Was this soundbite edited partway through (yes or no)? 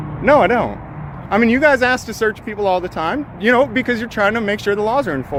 no